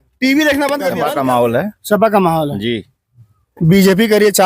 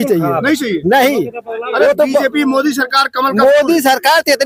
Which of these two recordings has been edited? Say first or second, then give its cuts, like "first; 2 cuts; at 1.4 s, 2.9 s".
first; 1 cut; at 0.9 s